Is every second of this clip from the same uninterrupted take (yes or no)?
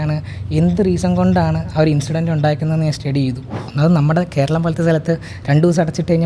no